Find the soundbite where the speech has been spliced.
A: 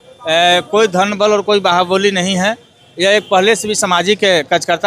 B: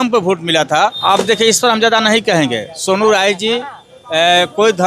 B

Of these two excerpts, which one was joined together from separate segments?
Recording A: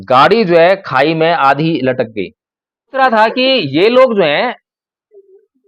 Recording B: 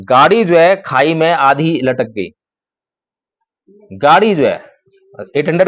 A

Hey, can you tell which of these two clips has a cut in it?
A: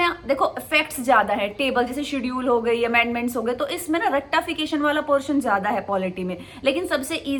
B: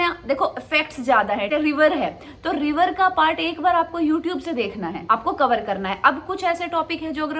B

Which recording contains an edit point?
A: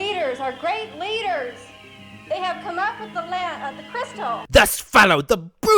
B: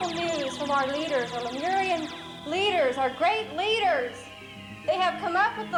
A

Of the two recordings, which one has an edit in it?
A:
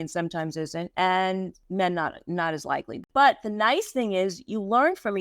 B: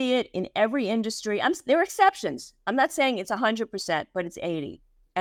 A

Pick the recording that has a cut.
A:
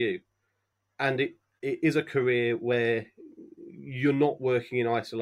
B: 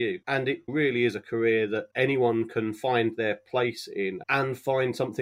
B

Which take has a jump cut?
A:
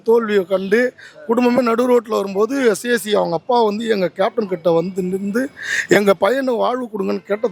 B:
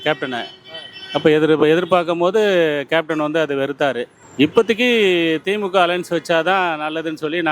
B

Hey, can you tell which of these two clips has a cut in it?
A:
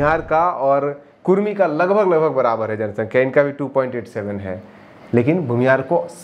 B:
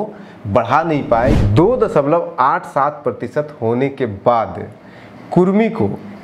B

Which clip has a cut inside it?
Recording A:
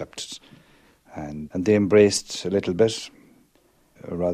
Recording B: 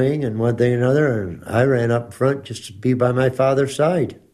A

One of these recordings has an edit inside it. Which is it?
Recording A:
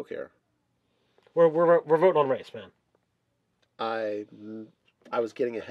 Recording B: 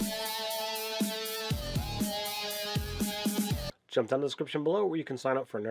B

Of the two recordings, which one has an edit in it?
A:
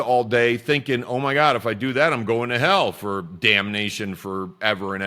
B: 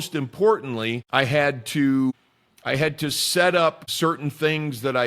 B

